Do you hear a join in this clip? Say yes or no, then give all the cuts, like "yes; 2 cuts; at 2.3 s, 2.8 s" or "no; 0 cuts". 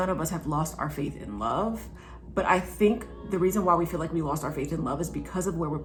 no; 0 cuts